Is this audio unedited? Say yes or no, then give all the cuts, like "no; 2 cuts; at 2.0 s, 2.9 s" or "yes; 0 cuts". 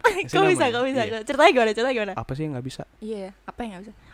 no; 1 cut; at 2.2 s